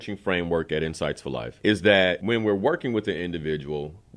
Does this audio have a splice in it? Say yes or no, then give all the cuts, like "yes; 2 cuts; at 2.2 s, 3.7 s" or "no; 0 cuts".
yes; 2 cuts; at 1.5 s, 2.2 s